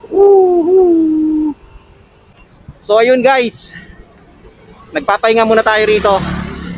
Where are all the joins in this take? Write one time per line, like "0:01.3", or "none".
0:02.6